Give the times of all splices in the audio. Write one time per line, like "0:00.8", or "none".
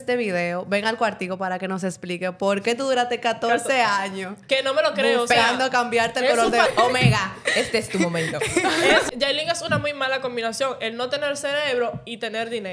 0:06.7
0:09.1